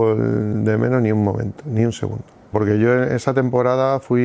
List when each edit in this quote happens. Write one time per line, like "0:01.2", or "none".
0:02.5